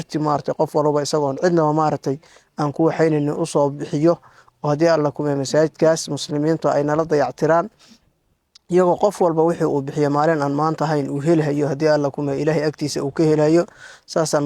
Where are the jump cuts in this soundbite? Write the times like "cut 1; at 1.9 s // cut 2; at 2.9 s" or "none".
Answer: none